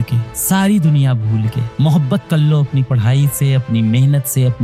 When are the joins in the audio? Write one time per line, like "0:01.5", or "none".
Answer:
none